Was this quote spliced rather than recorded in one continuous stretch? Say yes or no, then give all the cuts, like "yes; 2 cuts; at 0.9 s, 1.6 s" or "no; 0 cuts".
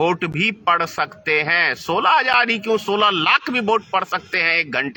no; 0 cuts